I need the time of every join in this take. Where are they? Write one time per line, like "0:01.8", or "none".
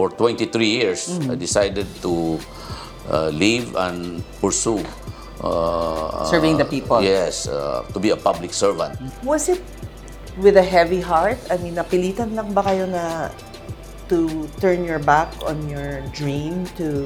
none